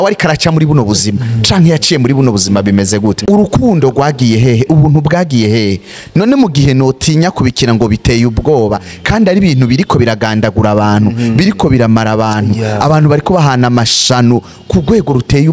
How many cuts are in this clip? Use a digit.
1